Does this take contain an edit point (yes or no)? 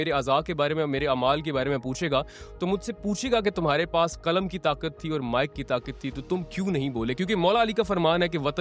no